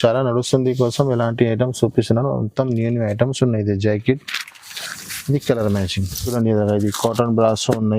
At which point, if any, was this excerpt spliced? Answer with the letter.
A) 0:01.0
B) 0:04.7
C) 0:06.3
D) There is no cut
C